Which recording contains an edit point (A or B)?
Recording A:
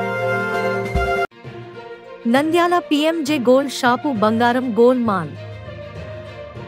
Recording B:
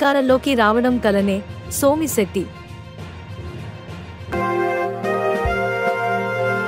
A